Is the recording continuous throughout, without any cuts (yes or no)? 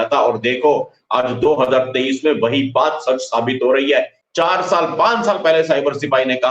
no